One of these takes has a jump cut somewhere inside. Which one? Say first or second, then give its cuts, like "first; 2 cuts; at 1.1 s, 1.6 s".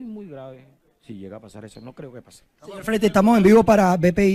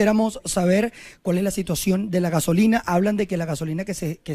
first; 1 cut; at 1.2 s